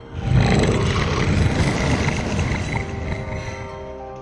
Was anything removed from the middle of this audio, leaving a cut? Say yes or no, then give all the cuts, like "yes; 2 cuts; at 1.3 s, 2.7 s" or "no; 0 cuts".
no; 0 cuts